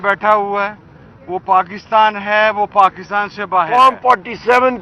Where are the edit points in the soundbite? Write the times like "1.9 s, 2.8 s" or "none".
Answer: 3.7 s